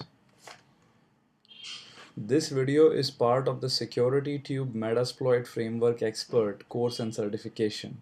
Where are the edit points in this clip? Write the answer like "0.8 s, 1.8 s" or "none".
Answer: 4.4 s